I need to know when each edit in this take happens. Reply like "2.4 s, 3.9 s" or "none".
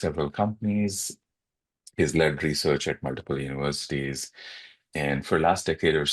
1.1 s